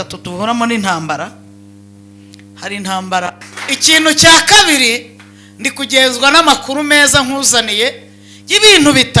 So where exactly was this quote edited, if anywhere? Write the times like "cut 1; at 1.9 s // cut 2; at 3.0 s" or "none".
cut 1; at 3.5 s